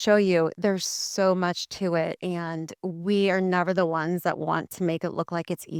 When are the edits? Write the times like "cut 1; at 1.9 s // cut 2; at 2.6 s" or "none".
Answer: none